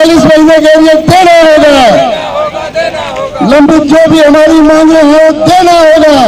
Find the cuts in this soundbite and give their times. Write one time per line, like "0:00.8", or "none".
none